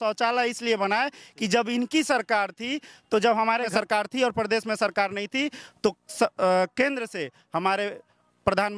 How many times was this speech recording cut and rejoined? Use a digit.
1